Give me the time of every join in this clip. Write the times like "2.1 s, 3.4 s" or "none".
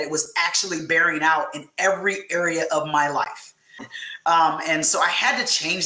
3.8 s